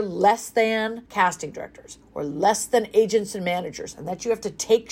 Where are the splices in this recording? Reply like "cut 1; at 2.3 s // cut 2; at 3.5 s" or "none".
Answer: cut 1; at 1.0 s